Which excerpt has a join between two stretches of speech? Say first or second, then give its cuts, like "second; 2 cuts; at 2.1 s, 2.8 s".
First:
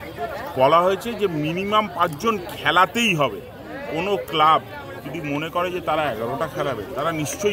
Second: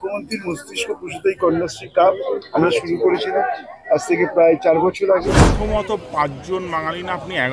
second; 1 cut; at 5.5 s